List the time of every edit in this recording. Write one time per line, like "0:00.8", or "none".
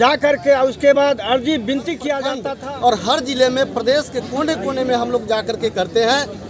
0:02.5